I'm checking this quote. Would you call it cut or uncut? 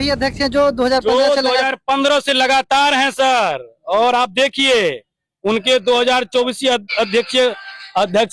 uncut